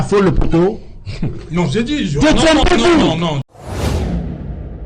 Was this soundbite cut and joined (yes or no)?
yes